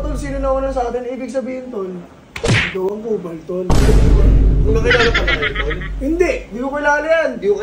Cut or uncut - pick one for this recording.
uncut